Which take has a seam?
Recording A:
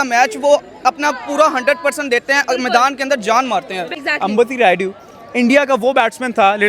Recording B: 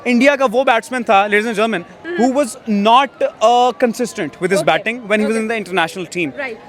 A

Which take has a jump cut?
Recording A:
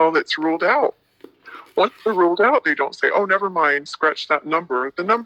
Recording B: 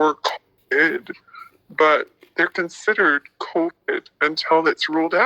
B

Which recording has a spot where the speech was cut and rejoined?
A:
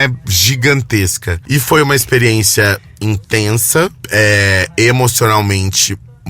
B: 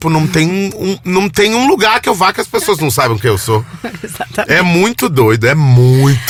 A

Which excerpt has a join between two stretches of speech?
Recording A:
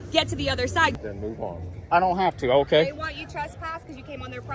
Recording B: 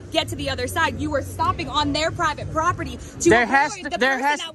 A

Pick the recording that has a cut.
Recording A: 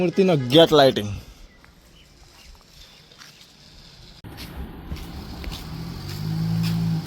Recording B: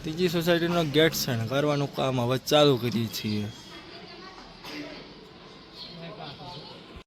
A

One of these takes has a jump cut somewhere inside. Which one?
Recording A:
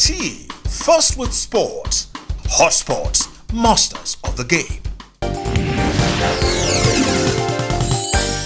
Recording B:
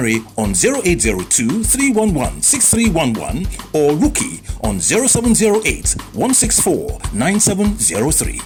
A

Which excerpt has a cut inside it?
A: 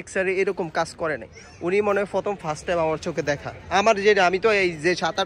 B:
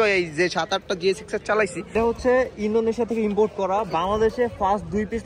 B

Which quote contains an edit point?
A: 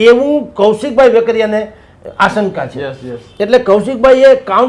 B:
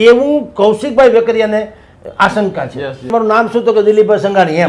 B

